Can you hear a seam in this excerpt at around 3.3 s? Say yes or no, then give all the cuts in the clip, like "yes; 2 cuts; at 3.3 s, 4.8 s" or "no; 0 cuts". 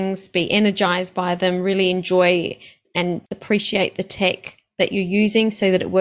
yes; 1 cut; at 3.3 s